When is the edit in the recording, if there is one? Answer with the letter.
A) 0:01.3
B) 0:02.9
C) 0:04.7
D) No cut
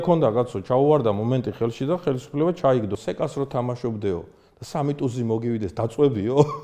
B